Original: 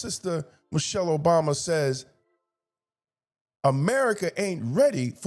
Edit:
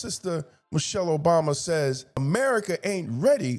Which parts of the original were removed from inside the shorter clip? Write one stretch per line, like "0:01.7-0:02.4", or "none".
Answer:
0:02.2-0:03.8